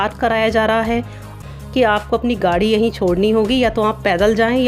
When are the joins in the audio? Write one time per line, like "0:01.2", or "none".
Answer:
0:01.3